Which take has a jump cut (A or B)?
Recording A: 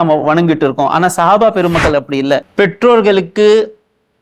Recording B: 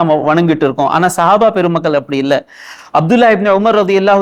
A